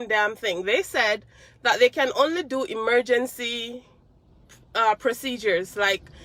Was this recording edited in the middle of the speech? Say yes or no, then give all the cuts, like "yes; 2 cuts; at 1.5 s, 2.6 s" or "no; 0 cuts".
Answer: no; 0 cuts